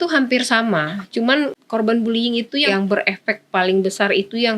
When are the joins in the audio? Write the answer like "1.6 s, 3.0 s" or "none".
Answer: 1.6 s, 2.6 s